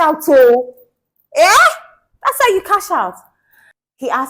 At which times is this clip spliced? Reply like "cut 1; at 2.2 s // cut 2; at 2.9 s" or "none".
none